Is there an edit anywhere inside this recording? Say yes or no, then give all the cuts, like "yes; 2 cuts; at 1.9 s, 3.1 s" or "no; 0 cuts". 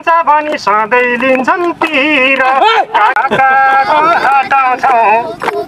yes; 1 cut; at 3.2 s